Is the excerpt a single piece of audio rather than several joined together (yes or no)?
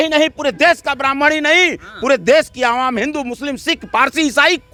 yes